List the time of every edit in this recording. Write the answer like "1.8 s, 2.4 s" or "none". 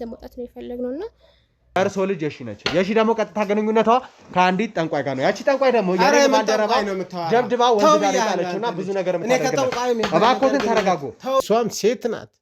1.8 s, 11.4 s